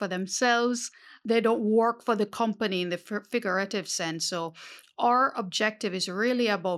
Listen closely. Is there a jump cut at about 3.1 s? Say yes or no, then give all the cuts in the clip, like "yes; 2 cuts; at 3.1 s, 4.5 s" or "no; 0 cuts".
no; 1 cut; at 1.1 s